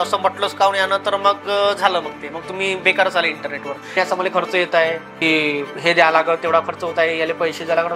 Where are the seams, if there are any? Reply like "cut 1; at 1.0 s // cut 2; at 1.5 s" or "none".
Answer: cut 1; at 3.9 s // cut 2; at 5.2 s

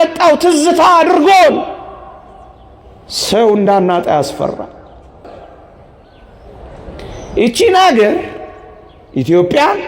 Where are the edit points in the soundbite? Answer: cut 1; at 5.2 s

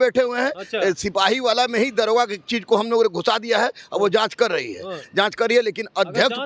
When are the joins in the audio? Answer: none

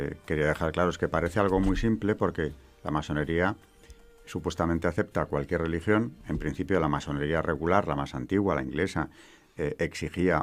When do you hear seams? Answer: none

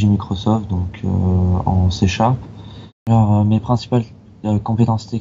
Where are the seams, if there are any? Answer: cut 1; at 3.1 s

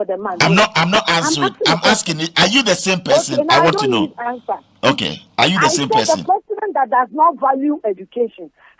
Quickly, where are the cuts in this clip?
none

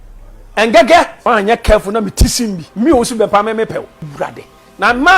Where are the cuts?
cut 1; at 1.1 s // cut 2; at 2.6 s // cut 3; at 4.0 s

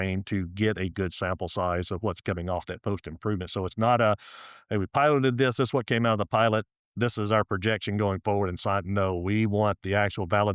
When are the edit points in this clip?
none

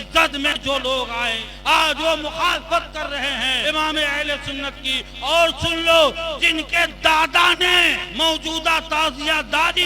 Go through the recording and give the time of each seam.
cut 1; at 1.4 s // cut 2; at 3.6 s // cut 3; at 8.0 s

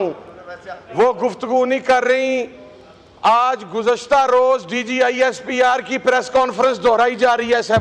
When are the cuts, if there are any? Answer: none

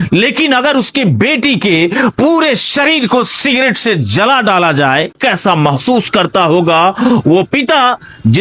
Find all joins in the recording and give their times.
none

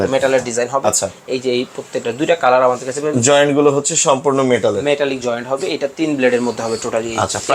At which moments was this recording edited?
none

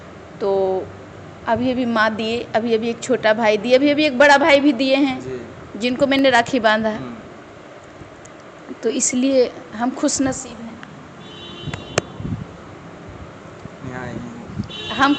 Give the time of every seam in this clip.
none

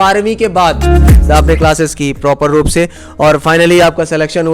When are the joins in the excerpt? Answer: cut 1; at 1.2 s

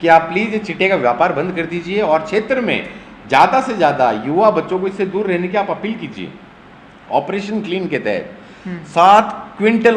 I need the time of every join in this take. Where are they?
none

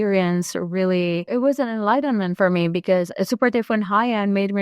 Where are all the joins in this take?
cut 1; at 1.3 s // cut 2; at 3.1 s

